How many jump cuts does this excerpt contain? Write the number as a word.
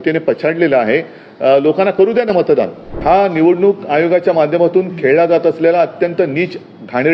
one